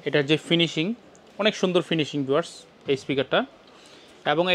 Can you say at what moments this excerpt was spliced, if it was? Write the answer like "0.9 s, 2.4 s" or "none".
none